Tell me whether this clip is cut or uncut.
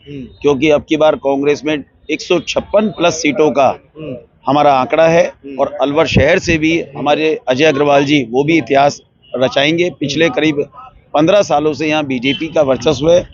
uncut